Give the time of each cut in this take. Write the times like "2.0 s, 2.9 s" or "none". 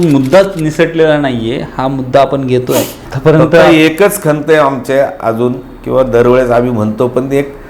3.0 s